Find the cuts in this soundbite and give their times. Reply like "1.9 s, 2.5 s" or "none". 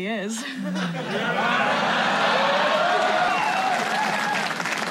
3.3 s

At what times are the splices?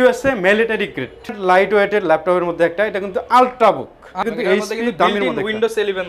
1.4 s, 4.2 s

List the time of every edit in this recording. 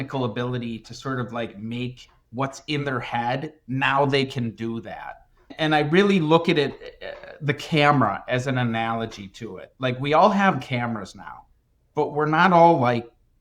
none

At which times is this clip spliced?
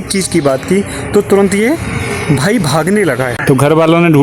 3.3 s

